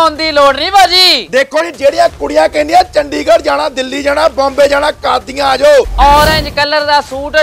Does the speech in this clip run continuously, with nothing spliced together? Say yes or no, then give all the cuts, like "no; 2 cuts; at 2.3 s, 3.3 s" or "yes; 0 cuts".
no; 1 cut; at 5.9 s